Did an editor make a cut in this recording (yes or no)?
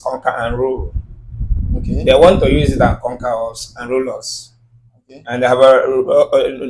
no